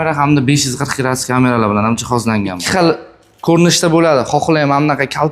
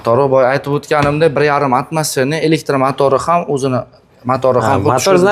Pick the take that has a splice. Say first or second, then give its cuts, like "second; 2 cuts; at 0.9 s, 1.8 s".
first; 1 cut; at 2.5 s